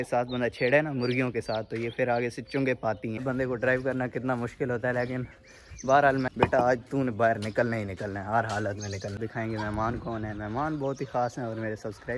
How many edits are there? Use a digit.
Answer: 3